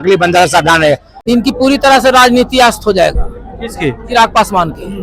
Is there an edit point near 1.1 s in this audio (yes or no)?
yes